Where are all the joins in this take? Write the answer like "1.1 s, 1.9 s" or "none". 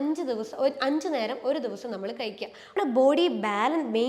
2.8 s